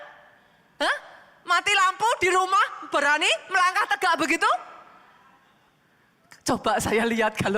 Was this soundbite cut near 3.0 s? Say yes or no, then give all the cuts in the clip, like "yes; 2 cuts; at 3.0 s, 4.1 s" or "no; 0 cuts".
yes; 1 cut; at 3.0 s